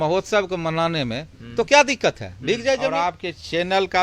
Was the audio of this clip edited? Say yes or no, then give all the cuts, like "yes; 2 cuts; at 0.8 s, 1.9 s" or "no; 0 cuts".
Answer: yes; 1 cut; at 3.0 s